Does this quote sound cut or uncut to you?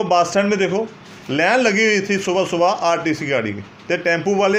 uncut